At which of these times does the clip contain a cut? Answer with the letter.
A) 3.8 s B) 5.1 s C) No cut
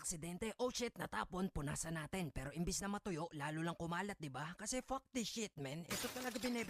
C